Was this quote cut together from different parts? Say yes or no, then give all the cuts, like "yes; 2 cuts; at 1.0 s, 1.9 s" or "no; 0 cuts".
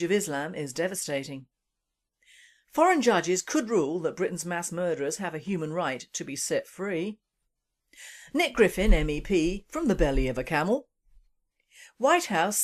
yes; 1 cut; at 4.4 s